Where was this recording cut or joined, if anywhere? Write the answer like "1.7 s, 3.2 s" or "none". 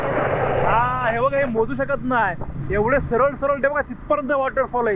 none